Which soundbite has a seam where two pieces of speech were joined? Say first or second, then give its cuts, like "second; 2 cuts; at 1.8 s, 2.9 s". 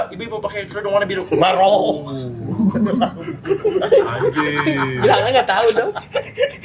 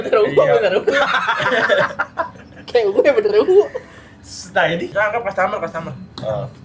second; 1 cut; at 4.9 s